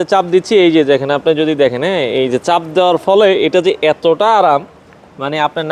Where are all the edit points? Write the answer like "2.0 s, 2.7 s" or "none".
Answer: none

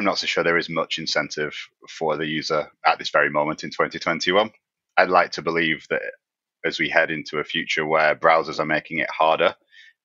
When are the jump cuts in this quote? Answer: 2.7 s, 4.8 s

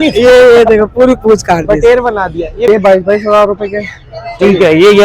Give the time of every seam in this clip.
2.7 s

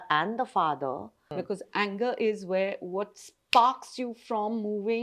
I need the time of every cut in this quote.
1.3 s

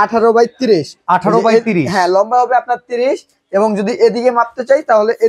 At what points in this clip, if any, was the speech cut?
none

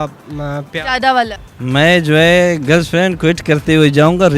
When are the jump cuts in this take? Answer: 1.4 s

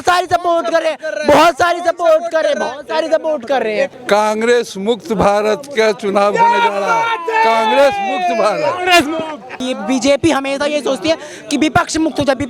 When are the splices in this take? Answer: 3.9 s, 9.6 s

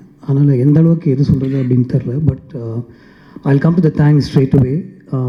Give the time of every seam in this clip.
none

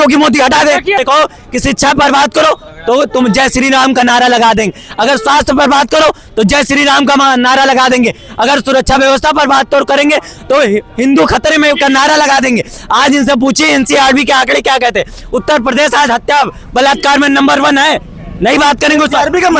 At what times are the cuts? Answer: 1.0 s

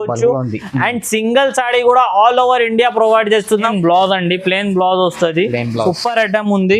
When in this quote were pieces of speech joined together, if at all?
3.7 s

